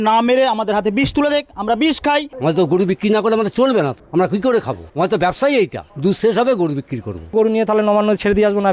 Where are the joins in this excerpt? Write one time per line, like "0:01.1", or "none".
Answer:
0:02.3
0:04.0
0:04.8
0:05.8
0:07.3